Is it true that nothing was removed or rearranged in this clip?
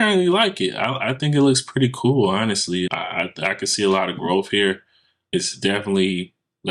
yes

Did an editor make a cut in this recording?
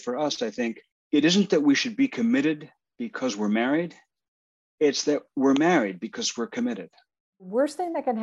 yes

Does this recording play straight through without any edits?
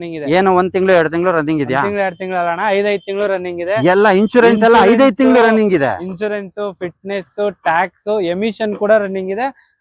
yes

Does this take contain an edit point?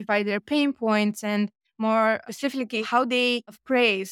yes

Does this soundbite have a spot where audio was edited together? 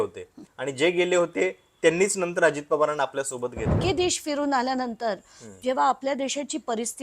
yes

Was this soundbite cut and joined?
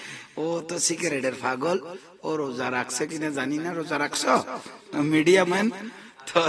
no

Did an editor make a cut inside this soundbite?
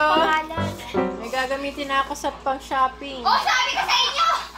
no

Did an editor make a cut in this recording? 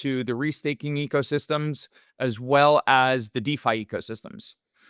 no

